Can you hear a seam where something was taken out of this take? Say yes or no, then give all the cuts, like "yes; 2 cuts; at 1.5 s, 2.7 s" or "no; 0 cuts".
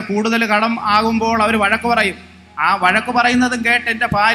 no; 0 cuts